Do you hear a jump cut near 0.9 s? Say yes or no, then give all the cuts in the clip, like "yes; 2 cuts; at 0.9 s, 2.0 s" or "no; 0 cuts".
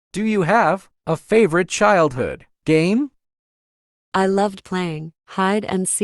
yes; 1 cut; at 0.9 s